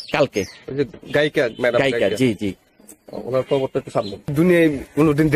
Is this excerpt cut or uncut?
cut